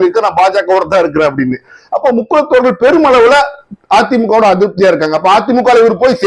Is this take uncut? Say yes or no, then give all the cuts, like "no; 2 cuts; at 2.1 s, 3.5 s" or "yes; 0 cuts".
yes; 0 cuts